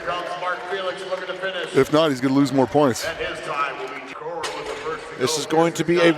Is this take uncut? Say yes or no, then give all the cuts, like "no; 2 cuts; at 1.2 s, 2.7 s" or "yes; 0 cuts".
no; 1 cut; at 4.1 s